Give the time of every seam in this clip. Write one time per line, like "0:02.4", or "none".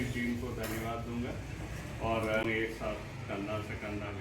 0:02.4